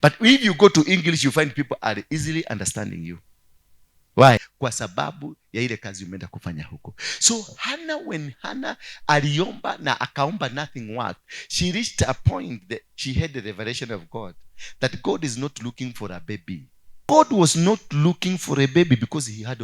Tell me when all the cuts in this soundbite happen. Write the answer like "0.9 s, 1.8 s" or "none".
4.5 s, 16.9 s